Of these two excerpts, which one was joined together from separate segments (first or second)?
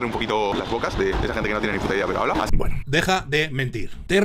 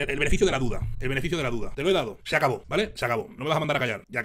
first